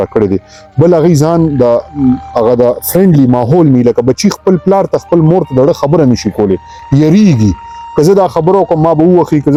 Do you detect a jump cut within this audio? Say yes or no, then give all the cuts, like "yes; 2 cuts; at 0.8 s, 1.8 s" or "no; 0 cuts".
no; 0 cuts